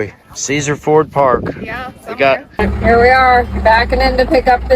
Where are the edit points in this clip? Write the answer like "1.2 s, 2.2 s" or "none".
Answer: 2.6 s